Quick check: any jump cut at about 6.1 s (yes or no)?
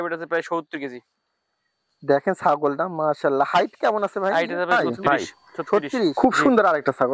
yes